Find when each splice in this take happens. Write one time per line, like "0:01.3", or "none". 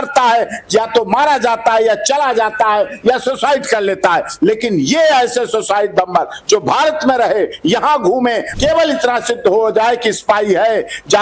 0:08.5

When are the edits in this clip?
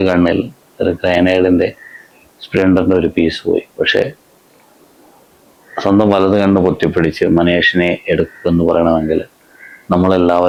none

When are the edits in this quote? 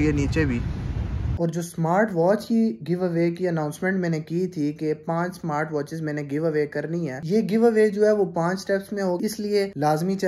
0:01.3
0:07.2
0:09.2

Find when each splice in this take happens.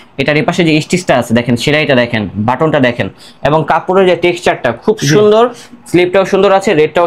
none

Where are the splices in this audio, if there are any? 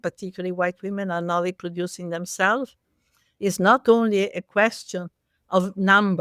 none

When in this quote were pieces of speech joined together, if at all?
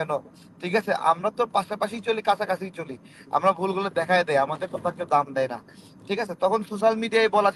none

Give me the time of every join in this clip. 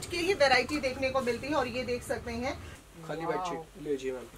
0:02.7

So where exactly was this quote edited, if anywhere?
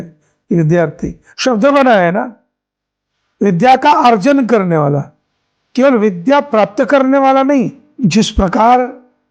0:07.8

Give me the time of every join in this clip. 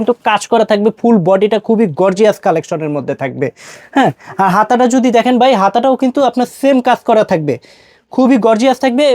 none

